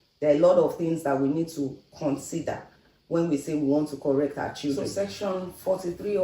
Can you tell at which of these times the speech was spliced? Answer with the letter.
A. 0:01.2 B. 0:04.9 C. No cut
B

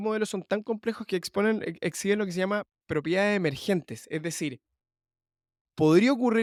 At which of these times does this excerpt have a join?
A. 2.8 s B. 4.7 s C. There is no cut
C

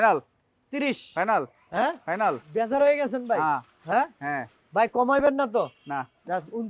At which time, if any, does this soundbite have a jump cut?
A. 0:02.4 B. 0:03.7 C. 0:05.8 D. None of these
A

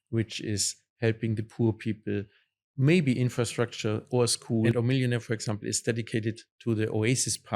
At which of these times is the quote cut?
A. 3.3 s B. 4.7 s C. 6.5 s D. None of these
B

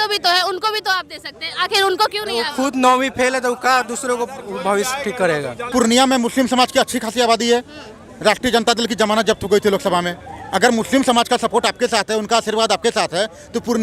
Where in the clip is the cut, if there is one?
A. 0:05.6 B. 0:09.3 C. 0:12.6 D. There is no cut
A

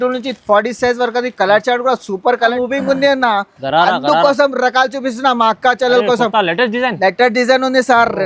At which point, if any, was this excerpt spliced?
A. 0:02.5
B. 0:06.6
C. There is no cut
A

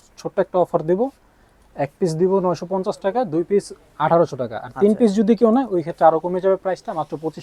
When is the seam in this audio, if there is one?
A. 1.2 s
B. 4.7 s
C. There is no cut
C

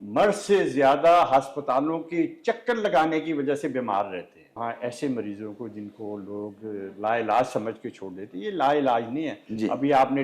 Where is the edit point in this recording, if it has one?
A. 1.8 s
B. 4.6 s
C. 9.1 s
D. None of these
B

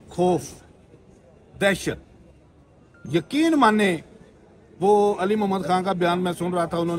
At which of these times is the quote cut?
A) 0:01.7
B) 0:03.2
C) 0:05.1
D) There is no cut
D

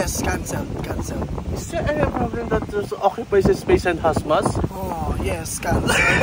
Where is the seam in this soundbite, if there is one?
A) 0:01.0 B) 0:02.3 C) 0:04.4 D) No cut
D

